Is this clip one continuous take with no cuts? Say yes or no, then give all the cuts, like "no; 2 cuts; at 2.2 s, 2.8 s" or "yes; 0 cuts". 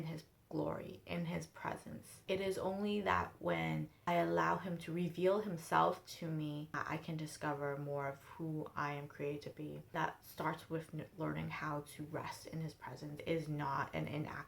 no; 5 cuts; at 2.1 s, 4.0 s, 6.8 s, 9.8 s, 13.2 s